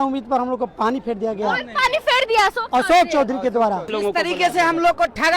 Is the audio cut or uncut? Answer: cut